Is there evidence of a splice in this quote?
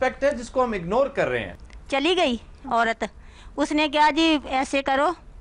yes; 1 cut; at 1.5 s

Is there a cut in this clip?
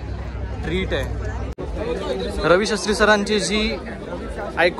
yes; 1 cut; at 1.6 s

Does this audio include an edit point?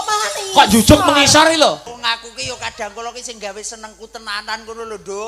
yes; 1 cut; at 1.9 s

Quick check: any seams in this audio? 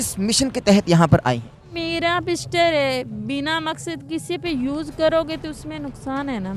yes; 1 cut; at 1.7 s

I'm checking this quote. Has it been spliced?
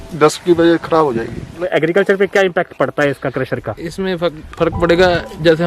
yes; 1 cut; at 1.6 s

